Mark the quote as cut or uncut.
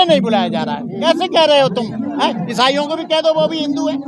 cut